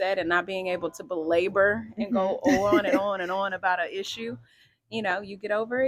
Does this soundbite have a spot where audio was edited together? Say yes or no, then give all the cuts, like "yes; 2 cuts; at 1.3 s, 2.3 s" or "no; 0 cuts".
no; 0 cuts